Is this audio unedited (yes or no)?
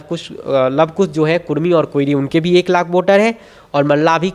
yes